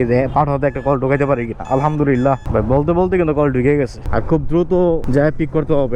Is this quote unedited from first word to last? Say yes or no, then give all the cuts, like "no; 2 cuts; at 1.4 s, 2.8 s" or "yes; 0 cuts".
no; 3 cuts; at 2.4 s, 4.0 s, 5.0 s